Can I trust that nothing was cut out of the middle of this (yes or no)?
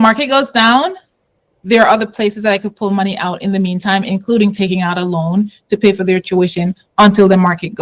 yes